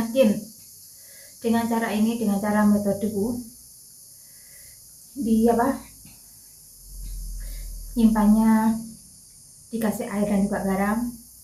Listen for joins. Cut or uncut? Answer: uncut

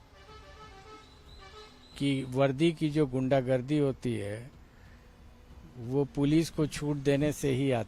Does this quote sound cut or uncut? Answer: uncut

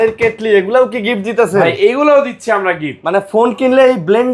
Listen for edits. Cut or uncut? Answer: uncut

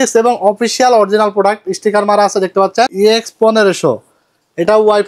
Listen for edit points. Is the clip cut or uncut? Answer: cut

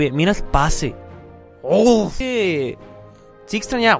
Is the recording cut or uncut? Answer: cut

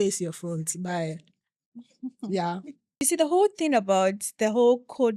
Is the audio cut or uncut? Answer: cut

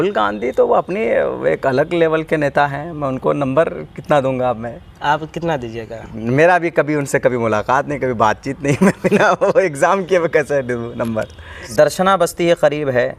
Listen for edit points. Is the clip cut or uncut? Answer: cut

